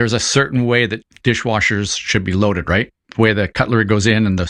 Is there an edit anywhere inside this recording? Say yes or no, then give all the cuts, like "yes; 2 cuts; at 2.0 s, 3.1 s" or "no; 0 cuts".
yes; 2 cuts; at 1.1 s, 3.0 s